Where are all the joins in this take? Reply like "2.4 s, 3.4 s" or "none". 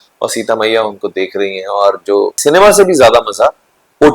2.4 s